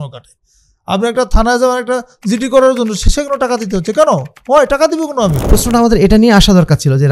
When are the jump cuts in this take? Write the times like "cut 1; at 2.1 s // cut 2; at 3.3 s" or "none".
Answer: cut 1; at 5.4 s